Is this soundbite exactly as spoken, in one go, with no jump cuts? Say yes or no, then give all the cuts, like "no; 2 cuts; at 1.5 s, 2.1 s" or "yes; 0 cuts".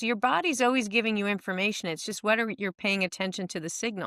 yes; 0 cuts